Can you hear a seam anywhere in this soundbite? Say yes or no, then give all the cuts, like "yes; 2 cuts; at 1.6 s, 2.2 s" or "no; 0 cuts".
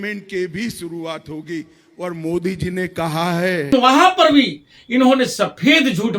yes; 1 cut; at 3.7 s